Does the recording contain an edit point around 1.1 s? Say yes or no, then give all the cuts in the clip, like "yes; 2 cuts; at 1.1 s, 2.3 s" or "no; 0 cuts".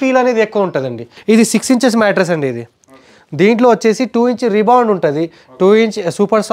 yes; 1 cut; at 1.1 s